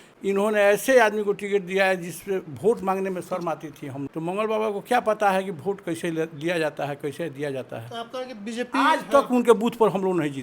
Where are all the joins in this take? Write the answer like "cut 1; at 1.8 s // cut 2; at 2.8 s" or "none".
cut 1; at 4.0 s